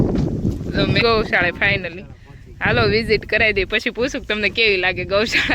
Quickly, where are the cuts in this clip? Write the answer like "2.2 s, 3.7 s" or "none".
1.0 s

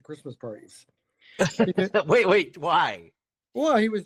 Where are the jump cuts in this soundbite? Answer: none

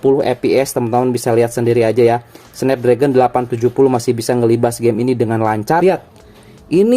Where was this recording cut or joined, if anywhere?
5.8 s

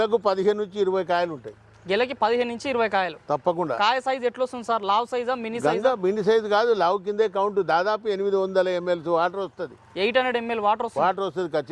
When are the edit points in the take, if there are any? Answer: none

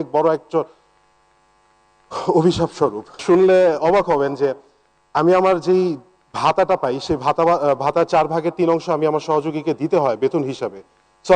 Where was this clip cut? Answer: 3.2 s

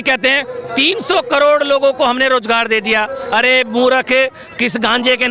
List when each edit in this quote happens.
none

